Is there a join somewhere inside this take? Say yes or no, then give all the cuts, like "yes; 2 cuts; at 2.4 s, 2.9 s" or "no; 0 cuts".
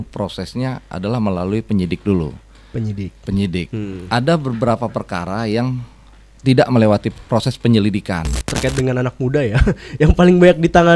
yes; 1 cut; at 8.5 s